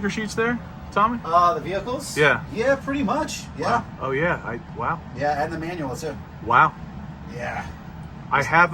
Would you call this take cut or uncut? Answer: uncut